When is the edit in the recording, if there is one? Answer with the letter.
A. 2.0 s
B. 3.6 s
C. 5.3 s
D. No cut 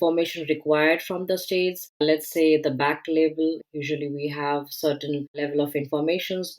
B